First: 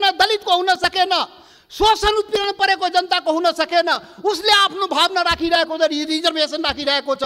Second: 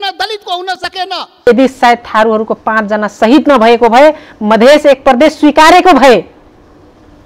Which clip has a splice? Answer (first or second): second